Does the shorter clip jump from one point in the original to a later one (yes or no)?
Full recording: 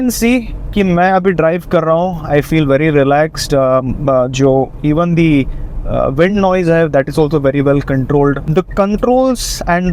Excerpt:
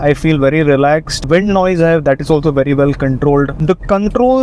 yes